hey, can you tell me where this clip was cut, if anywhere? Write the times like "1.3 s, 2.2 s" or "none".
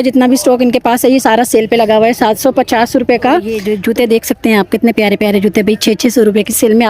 3.6 s